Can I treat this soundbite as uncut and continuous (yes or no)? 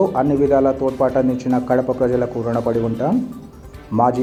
yes